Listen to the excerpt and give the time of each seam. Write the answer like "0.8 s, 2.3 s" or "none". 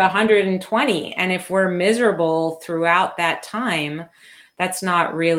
none